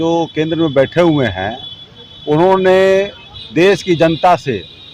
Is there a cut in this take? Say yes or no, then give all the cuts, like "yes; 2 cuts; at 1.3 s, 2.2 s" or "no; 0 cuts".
no; 0 cuts